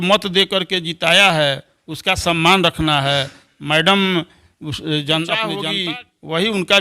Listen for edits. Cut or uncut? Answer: cut